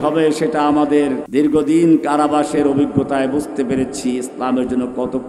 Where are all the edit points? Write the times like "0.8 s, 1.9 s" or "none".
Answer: 1.2 s